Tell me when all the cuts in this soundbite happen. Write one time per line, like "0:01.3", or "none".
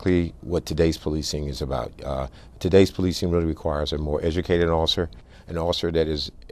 none